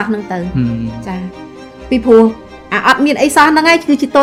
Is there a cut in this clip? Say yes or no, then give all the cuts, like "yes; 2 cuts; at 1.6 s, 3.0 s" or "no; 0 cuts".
no; 0 cuts